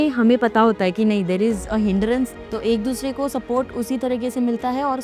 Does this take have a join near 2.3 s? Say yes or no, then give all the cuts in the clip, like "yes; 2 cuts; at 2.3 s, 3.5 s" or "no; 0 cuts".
yes; 1 cut; at 2.3 s